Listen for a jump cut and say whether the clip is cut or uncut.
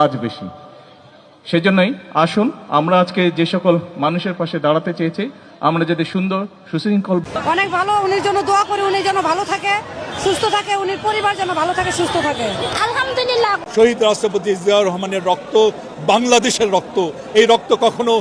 cut